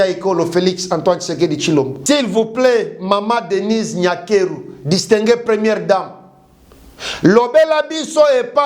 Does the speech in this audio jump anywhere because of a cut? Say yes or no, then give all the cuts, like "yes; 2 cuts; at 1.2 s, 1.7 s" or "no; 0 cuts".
yes; 1 cut; at 2.0 s